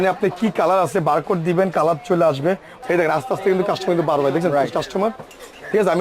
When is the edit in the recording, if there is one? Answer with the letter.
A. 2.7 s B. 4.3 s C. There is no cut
A